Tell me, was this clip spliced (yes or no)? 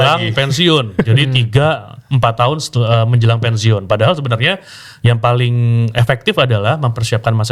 no